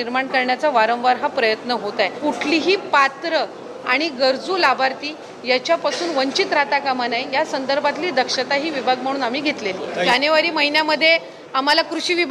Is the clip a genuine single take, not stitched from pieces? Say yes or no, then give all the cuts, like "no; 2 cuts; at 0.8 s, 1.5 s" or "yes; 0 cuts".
no; 2 cuts; at 2.1 s, 10.1 s